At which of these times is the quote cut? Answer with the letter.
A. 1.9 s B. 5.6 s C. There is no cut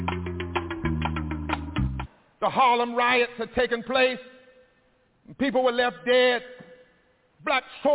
A